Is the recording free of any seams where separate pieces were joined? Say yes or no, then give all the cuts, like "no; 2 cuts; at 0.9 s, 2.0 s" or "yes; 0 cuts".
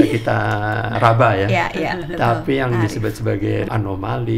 no; 2 cuts; at 0.9 s, 3.7 s